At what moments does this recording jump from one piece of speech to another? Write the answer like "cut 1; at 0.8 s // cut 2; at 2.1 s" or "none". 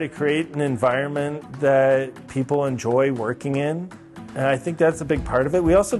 none

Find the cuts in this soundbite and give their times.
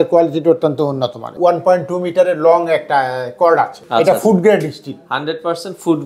cut 1; at 1.3 s // cut 2; at 3.8 s

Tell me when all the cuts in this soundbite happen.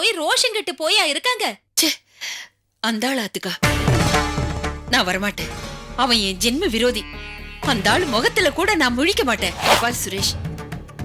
cut 1; at 1.7 s // cut 2; at 9.6 s

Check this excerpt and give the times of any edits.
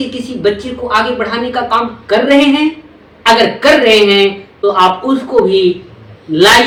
none

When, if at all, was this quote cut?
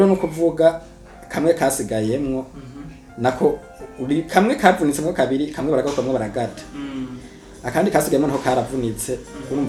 none

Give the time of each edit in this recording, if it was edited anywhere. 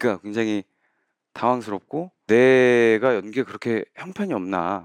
cut 1; at 2.2 s

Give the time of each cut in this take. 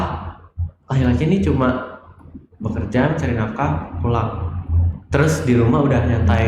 none

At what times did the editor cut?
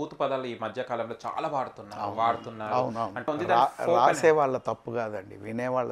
cut 1; at 3.3 s

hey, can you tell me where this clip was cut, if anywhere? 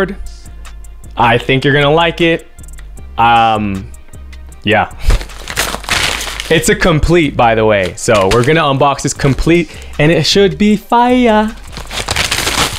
none

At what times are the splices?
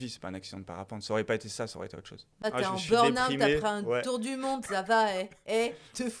cut 1; at 2.5 s

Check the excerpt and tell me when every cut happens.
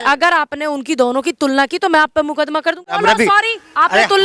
cut 1; at 2.9 s

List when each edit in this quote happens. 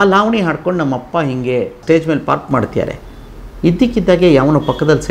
cut 1; at 1.8 s

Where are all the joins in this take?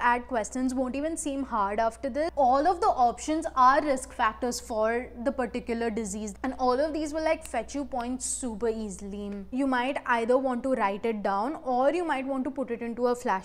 cut 1; at 2.3 s // cut 2; at 6.3 s // cut 3; at 9.5 s

